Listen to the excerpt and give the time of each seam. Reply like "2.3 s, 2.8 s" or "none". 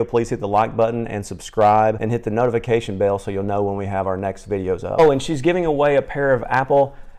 2.0 s, 5.0 s

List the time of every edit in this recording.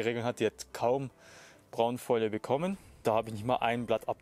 2.9 s

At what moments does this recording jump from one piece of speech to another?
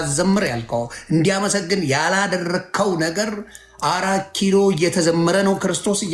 none

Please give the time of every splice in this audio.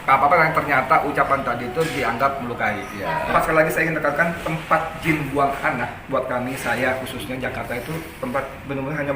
3.3 s

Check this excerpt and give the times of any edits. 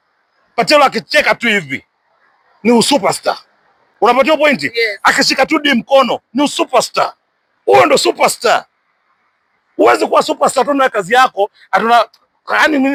none

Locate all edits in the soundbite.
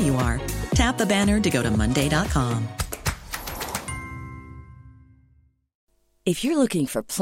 none

